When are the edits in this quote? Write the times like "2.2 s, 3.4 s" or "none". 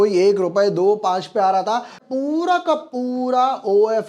2.0 s